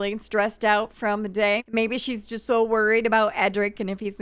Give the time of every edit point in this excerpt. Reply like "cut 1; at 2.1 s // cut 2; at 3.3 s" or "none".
cut 1; at 1.6 s